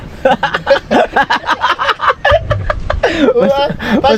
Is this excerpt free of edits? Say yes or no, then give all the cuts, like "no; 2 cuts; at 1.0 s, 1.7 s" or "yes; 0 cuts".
yes; 0 cuts